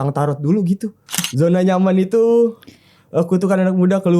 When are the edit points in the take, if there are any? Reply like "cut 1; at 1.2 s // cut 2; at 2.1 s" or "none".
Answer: cut 1; at 1.2 s